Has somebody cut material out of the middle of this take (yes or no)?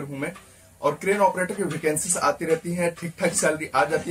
no